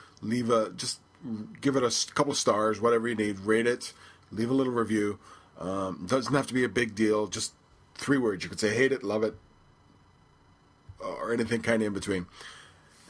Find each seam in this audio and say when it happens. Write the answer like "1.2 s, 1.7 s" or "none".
6.0 s